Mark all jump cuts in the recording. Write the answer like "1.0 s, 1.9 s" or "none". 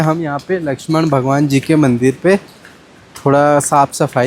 none